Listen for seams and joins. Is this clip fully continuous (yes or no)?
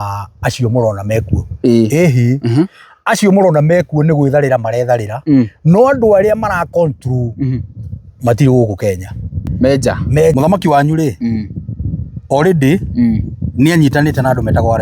no